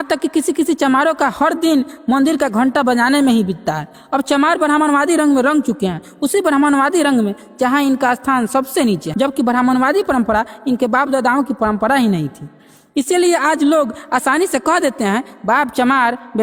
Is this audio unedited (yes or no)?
yes